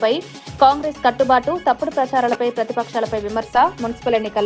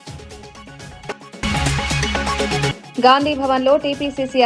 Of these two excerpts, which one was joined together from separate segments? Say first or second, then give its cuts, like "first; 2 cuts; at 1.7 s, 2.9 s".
second; 1 cut; at 1.1 s